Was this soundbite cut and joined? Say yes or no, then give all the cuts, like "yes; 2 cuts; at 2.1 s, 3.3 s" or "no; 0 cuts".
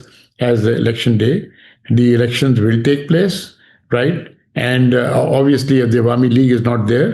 no; 0 cuts